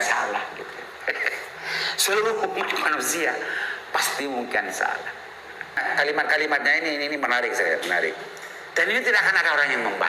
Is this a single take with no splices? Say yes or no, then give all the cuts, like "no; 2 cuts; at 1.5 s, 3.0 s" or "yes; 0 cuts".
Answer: no; 1 cut; at 5.8 s